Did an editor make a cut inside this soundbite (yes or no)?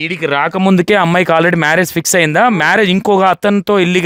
no